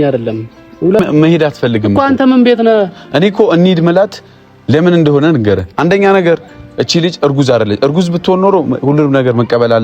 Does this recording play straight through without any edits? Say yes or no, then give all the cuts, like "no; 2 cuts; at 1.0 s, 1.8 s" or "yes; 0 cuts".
no; 1 cut; at 1.0 s